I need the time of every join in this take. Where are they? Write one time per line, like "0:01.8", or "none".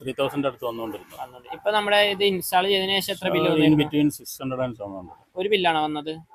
none